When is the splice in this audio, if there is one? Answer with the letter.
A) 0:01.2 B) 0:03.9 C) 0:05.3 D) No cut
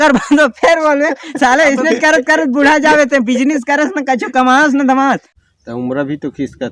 C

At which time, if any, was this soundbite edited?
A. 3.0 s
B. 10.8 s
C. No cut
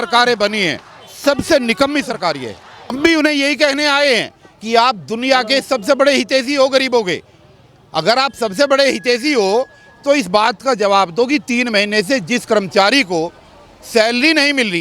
A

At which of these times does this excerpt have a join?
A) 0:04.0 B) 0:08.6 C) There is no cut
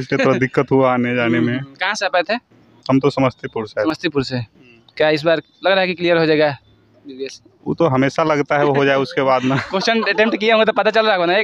C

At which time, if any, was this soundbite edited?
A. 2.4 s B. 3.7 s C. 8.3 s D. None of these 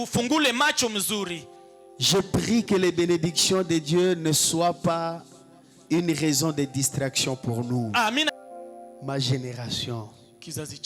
C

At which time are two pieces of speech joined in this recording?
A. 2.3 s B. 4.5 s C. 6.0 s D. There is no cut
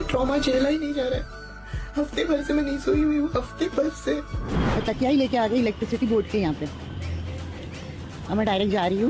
B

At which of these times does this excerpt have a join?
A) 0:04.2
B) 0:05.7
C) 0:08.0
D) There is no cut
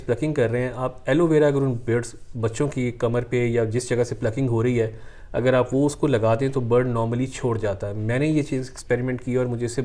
D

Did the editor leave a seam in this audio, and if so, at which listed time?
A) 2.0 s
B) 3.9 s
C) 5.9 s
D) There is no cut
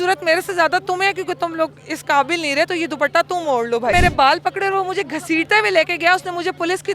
B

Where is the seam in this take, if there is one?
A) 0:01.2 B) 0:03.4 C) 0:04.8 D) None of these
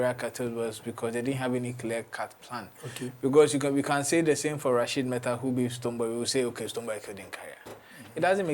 D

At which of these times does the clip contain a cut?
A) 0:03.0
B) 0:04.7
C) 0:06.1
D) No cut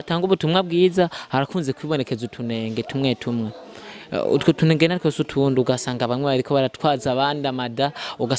D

